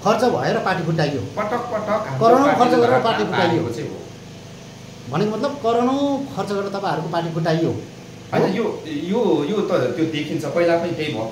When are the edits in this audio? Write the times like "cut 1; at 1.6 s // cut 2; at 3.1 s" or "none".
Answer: none